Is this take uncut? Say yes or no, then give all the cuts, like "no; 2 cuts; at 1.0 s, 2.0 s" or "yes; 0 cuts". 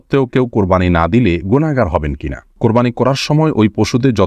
no; 1 cut; at 2.6 s